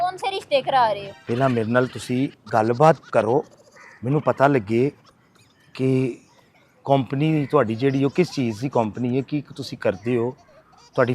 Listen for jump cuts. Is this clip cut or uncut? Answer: cut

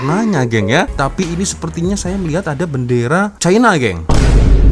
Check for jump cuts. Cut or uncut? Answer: cut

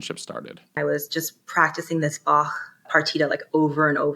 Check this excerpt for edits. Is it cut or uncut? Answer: cut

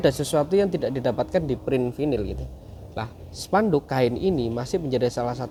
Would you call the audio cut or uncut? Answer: uncut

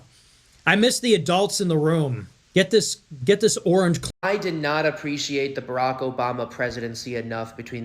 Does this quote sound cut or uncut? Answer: cut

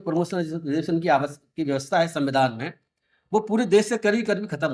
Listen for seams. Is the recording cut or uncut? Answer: uncut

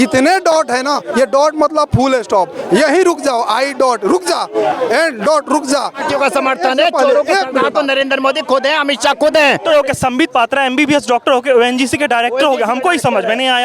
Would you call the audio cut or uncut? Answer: cut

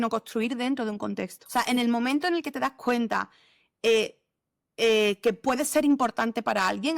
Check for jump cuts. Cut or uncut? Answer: cut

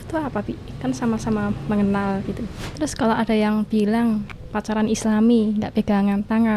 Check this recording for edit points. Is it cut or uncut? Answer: cut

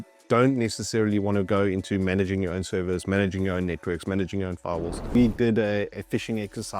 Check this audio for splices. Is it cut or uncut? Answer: cut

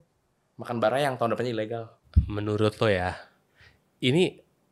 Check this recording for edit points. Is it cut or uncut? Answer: uncut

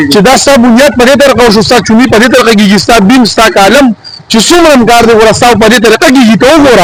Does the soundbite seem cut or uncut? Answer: uncut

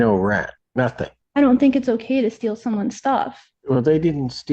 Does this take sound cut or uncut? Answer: cut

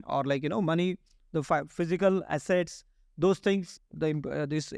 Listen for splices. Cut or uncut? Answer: cut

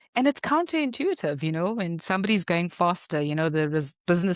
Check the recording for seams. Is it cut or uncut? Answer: uncut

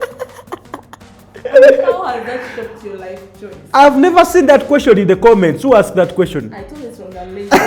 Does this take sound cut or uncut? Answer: cut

